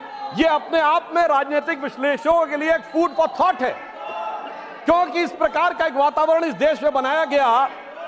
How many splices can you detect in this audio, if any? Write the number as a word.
zero